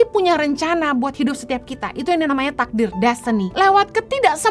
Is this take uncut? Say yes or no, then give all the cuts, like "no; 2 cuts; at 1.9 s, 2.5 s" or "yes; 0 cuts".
no; 1 cut; at 3.5 s